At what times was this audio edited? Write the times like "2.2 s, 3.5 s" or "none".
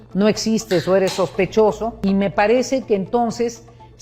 1.9 s